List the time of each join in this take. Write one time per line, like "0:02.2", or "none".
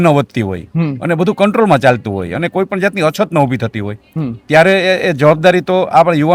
none